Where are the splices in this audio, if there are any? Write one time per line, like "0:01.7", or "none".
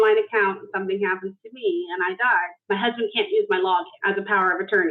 0:02.5
0:03.9